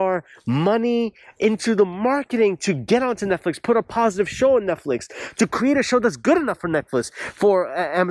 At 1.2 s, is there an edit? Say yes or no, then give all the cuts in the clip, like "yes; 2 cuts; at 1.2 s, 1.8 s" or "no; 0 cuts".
no; 0 cuts